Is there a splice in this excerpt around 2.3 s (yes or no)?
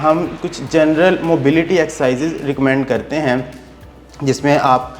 no